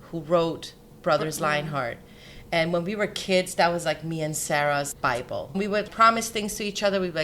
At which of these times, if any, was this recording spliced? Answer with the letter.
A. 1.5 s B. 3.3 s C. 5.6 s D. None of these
C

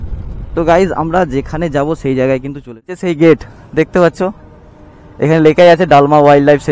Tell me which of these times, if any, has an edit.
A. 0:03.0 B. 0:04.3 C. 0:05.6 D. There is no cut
A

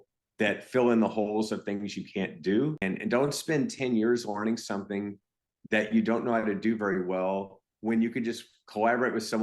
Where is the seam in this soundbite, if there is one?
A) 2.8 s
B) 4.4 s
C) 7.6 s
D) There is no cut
A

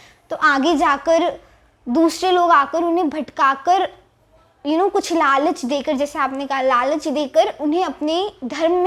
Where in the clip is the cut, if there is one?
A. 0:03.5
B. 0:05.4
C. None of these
C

